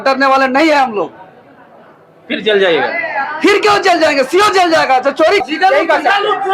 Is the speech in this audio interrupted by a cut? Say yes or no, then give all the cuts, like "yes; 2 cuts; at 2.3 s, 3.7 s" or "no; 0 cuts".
yes; 1 cut; at 5.4 s